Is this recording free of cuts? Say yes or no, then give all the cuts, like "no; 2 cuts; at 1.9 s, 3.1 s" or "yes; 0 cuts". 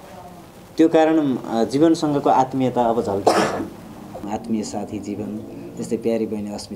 no; 1 cut; at 4.3 s